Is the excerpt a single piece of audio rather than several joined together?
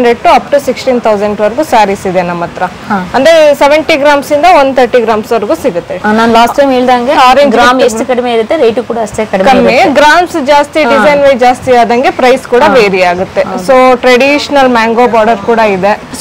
yes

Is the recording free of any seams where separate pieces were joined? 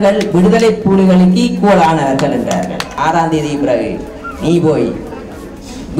no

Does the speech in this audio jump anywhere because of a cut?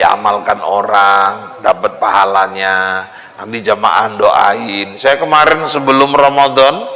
no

